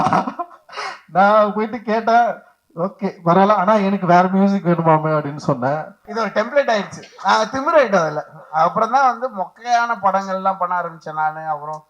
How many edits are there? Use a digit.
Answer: 1